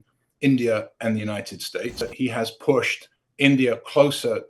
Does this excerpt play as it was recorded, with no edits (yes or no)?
no